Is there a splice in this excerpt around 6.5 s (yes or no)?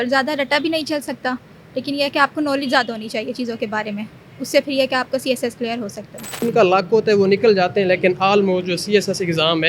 yes